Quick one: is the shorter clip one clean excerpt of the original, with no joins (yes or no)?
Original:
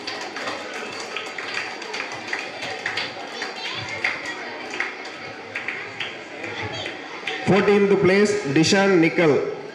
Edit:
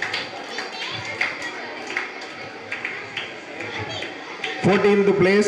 yes